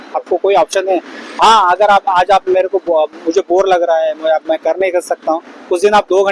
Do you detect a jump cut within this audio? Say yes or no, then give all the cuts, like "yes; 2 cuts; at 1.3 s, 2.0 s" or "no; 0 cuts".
no; 0 cuts